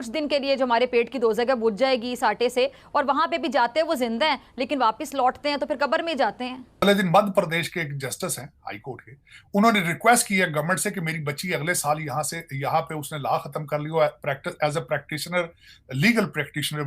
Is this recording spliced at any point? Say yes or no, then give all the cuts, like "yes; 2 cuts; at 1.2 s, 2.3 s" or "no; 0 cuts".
yes; 1 cut; at 6.8 s